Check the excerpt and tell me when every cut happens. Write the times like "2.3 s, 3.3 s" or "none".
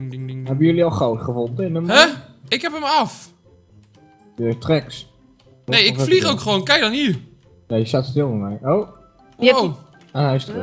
none